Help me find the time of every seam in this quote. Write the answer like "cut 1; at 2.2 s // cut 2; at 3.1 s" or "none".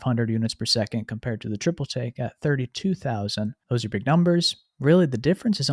cut 1; at 3.6 s

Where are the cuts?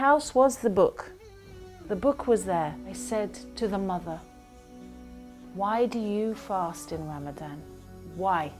cut 1; at 2.9 s

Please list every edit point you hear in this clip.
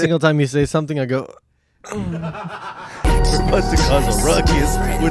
cut 1; at 3.0 s

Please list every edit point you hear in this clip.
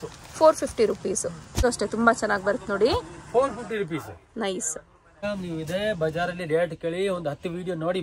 cut 1; at 1.6 s // cut 2; at 5.2 s

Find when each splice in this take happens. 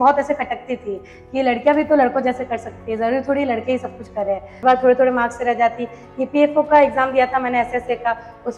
cut 1; at 4.6 s

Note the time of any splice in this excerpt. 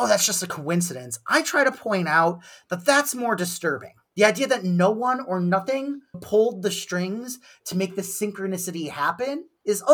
none

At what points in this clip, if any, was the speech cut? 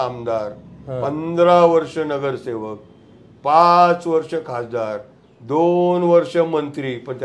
none

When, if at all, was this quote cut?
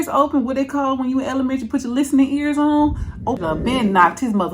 cut 1; at 3.4 s

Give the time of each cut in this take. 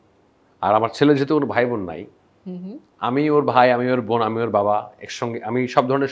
none

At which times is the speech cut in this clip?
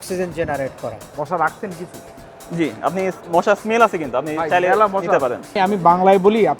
cut 1; at 1.0 s // cut 2; at 5.5 s

